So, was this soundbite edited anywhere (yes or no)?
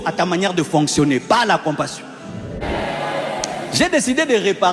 yes